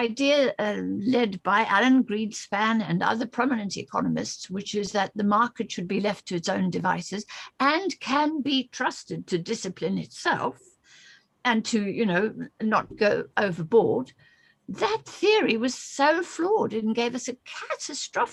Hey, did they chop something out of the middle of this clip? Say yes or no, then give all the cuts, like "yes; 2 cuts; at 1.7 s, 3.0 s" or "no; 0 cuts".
no; 0 cuts